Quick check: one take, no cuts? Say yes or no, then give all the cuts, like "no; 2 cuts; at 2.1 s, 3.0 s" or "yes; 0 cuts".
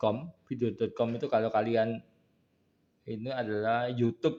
yes; 0 cuts